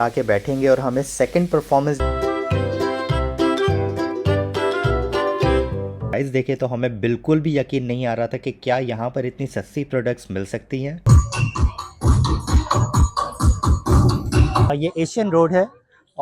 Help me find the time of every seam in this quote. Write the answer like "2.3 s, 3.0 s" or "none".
2.0 s, 6.1 s, 11.0 s, 14.7 s